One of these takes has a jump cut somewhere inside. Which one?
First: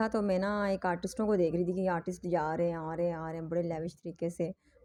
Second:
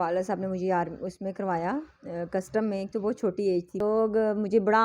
second; 1 cut; at 3.8 s

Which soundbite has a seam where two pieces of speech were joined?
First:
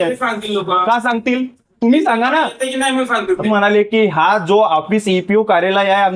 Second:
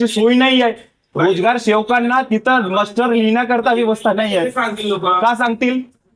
first; 1 cut; at 3.5 s

